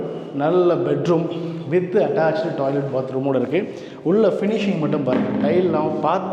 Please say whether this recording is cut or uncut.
uncut